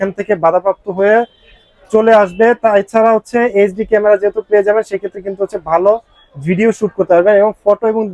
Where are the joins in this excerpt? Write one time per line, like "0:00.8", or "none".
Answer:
none